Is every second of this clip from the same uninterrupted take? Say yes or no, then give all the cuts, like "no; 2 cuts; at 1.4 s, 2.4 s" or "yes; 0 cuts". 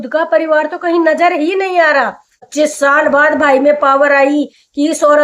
no; 1 cut; at 2.5 s